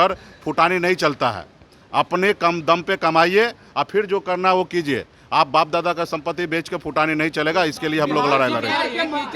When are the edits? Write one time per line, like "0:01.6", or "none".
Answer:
none